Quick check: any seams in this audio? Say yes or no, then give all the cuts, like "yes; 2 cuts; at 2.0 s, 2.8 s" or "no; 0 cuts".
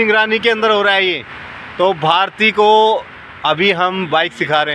no; 0 cuts